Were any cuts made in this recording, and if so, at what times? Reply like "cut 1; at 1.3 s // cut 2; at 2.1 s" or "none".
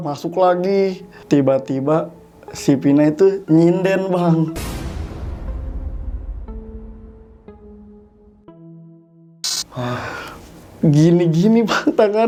none